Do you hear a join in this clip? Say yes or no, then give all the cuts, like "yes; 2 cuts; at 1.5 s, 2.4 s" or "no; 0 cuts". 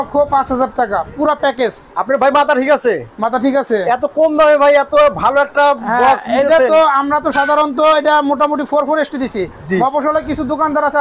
no; 0 cuts